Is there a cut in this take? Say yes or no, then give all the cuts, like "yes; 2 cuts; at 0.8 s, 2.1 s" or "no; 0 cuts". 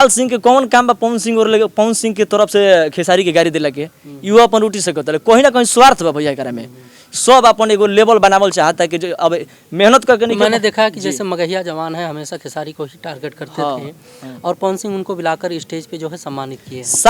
no; 0 cuts